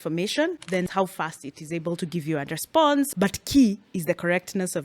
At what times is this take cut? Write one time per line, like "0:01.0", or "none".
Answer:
0:00.9
0:03.1